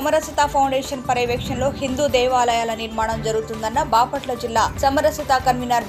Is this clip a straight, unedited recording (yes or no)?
yes